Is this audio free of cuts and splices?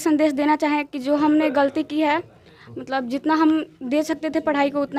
yes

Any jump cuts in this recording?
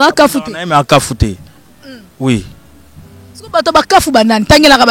no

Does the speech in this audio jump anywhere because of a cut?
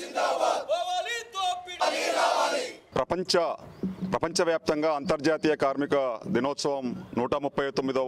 yes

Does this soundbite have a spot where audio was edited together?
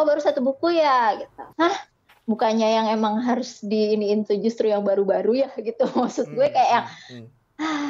yes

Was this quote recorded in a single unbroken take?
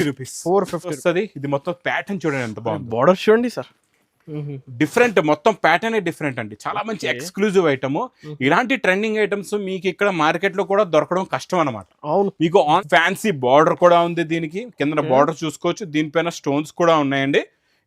no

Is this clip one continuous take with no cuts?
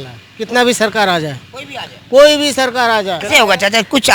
no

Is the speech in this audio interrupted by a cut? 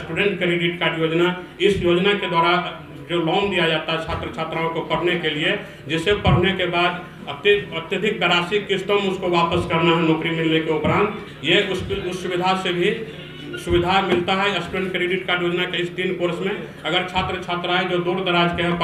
no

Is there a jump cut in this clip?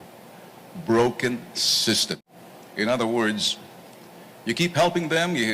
no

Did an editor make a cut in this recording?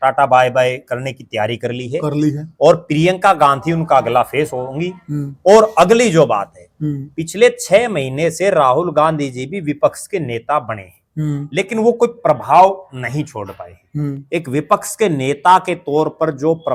no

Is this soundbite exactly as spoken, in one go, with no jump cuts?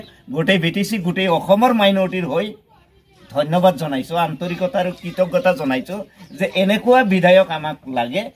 yes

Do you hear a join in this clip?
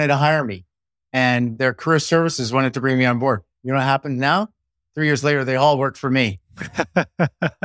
no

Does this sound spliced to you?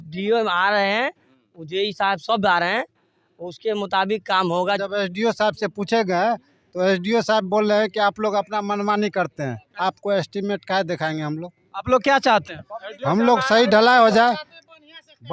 yes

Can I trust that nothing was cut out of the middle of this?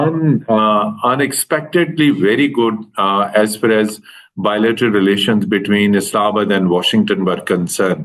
yes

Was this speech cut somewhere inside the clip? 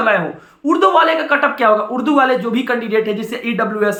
no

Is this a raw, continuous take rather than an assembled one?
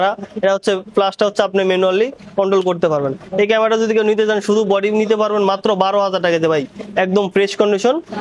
yes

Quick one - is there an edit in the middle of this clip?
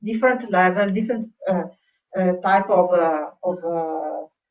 no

